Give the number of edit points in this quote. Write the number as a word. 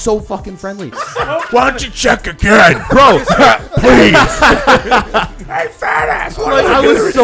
one